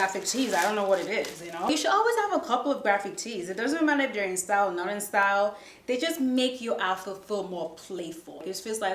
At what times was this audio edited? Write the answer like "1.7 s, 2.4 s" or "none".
none